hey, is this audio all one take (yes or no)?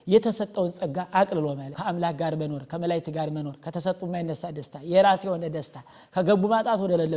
no